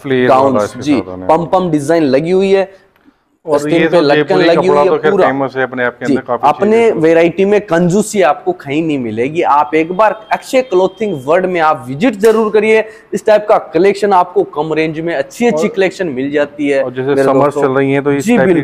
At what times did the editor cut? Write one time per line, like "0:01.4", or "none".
none